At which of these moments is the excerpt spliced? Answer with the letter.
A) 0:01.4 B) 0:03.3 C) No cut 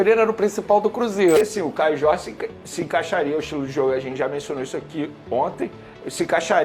A